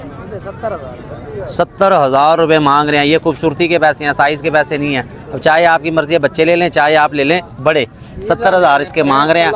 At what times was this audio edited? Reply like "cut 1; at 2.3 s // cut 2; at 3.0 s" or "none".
none